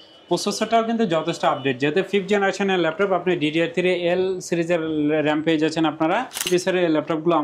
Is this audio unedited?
no; 1 cut; at 6.4 s

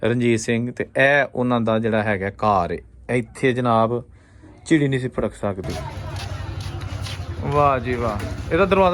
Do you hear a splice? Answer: yes; 1 cut; at 5.7 s

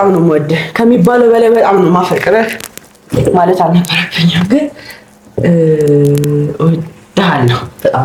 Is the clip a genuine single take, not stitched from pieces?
yes; 0 cuts

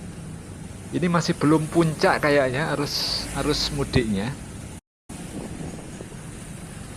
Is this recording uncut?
no; 1 cut; at 5.0 s

